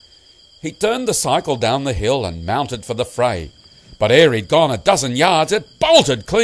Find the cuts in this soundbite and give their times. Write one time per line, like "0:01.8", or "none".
0:01.6